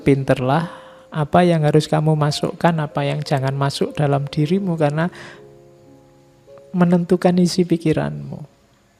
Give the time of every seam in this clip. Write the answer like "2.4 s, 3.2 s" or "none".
none